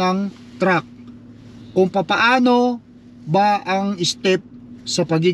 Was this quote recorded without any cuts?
yes; 0 cuts

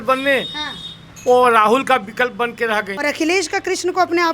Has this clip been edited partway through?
yes; 1 cut; at 2.9 s

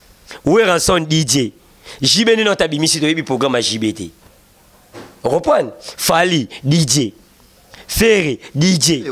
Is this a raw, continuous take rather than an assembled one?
yes; 0 cuts

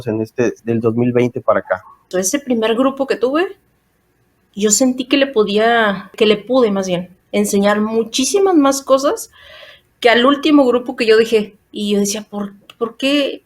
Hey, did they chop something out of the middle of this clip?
yes; 2 cuts; at 2.1 s, 6.1 s

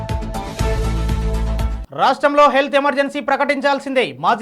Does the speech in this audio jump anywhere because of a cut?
yes; 1 cut; at 1.8 s

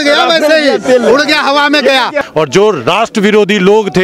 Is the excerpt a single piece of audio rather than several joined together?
no; 1 cut; at 2.2 s

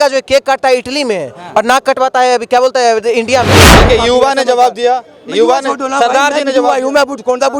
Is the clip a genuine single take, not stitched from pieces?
no; 1 cut; at 3.7 s

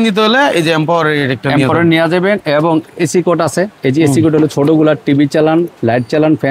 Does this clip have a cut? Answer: no; 0 cuts

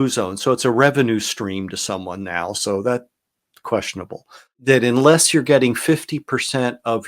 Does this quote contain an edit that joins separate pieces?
yes; 1 cut; at 4.6 s

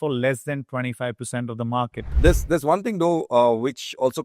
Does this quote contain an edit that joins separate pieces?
yes; 1 cut; at 2.1 s

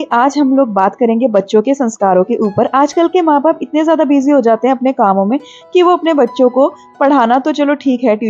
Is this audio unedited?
yes; 0 cuts

